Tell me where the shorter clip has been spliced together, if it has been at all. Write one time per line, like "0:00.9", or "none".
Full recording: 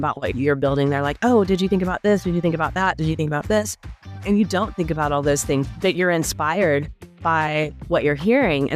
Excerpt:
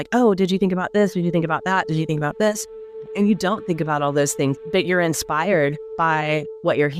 0:05.8